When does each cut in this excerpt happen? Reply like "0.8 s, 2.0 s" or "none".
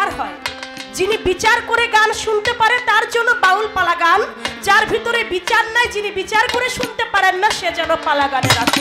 none